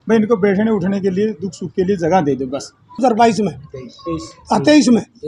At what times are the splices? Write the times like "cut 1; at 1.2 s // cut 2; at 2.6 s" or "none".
cut 1; at 3.0 s